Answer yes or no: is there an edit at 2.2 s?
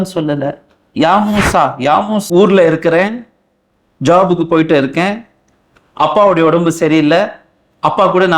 yes